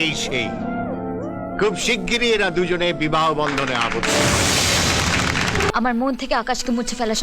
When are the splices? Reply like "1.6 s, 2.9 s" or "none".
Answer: 5.7 s